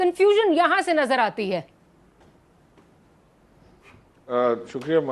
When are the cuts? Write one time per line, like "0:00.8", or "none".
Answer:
none